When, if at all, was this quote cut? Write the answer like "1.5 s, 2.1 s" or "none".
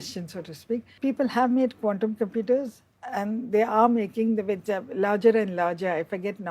none